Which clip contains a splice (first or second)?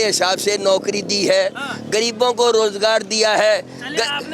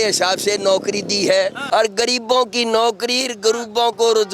second